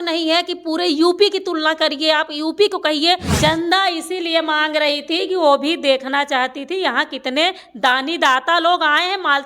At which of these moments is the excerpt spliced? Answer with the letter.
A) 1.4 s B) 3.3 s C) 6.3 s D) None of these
B